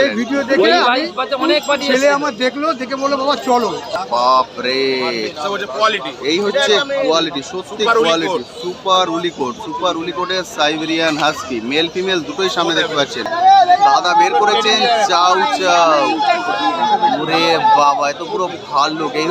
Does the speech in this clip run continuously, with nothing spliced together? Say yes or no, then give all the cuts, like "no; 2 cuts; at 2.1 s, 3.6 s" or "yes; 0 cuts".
no; 2 cuts; at 3.9 s, 13.3 s